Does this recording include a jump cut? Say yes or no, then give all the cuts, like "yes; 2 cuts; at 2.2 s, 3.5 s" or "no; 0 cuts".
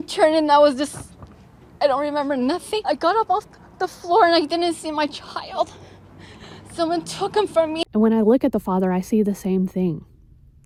no; 0 cuts